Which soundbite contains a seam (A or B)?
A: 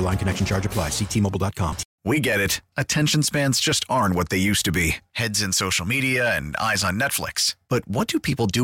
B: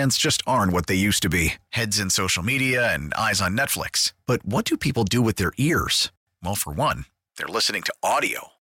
A